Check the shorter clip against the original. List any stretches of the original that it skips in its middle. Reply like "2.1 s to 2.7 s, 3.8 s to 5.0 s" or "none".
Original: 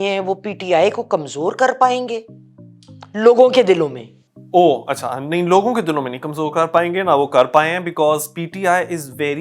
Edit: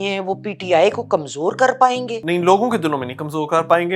2.2 s to 5.2 s